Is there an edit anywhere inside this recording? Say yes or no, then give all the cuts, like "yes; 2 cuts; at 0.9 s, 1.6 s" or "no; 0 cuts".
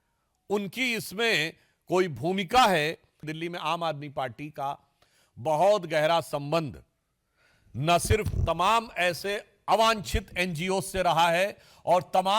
yes; 1 cut; at 3.2 s